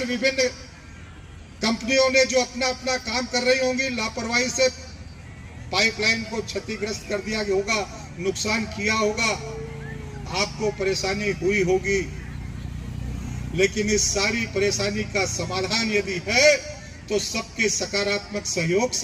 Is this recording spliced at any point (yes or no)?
no